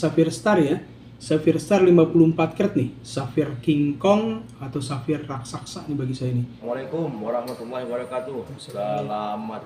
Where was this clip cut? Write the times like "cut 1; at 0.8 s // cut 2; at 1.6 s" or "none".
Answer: cut 1; at 6.6 s